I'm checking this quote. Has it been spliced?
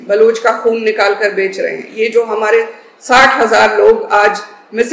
no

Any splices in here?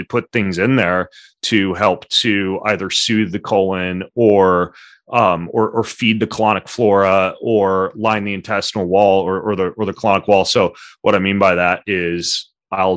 no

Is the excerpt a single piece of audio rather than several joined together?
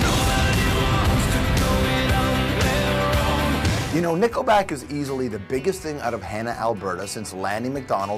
no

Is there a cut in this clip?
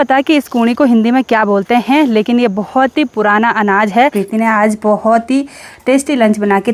yes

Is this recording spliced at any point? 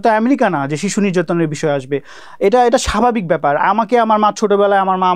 no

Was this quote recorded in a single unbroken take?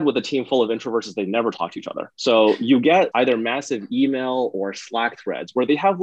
no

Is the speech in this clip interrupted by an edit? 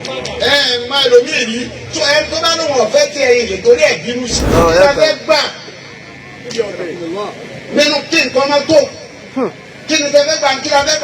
yes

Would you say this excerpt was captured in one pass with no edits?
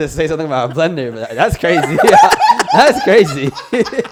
yes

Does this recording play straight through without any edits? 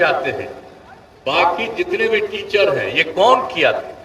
yes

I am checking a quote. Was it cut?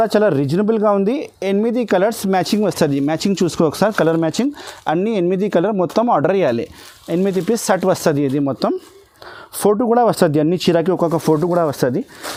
no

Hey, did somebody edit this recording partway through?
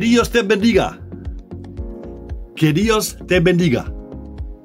yes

